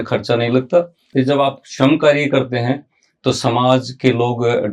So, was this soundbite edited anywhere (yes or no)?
yes